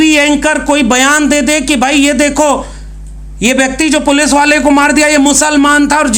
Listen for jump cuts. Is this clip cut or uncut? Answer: uncut